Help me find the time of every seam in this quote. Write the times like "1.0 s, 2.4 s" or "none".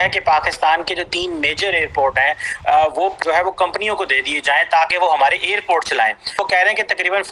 3.1 s, 6.3 s